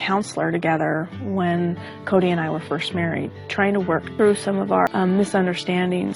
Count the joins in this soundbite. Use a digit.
2